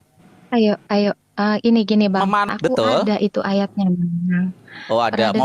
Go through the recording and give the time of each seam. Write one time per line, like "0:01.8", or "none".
0:02.5

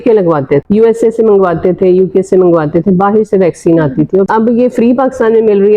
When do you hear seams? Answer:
0:04.3

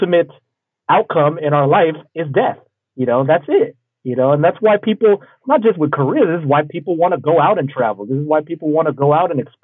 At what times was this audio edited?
none

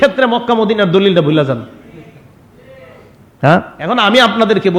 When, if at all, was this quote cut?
0:03.8

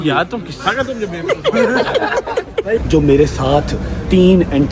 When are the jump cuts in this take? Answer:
0:02.8

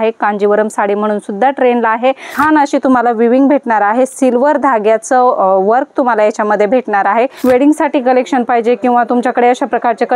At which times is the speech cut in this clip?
0:02.4
0:07.3

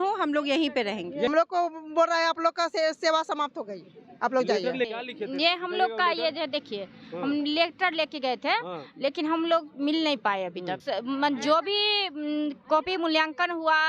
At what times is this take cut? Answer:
0:01.3
0:04.9
0:10.7

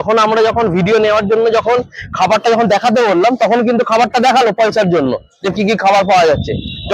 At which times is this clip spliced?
none

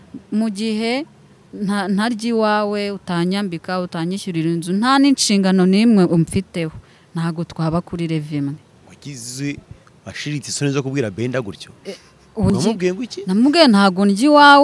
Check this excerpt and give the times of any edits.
0:12.5

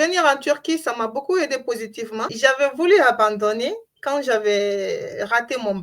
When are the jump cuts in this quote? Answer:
0:02.3

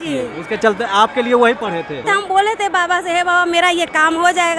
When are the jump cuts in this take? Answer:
0:02.1

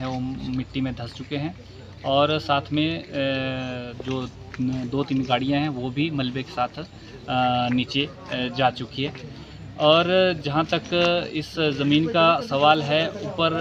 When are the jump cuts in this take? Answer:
none

